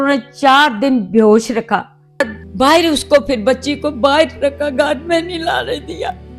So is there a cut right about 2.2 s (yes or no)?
yes